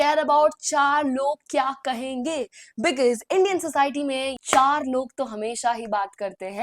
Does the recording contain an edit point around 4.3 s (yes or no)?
yes